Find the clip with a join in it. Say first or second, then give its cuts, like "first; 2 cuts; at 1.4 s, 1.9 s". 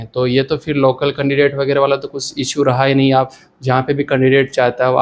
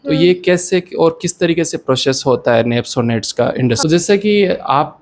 second; 1 cut; at 3.8 s